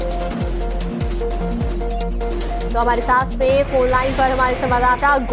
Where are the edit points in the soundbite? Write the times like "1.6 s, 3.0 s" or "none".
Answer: 3.5 s